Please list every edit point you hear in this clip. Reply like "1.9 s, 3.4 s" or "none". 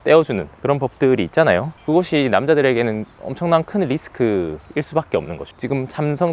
5.4 s